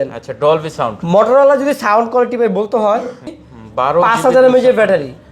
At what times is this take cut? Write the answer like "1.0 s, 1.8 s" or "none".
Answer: 3.4 s